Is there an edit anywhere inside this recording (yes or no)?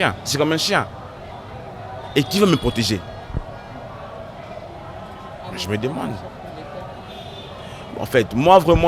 no